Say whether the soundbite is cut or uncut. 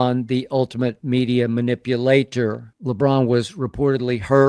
cut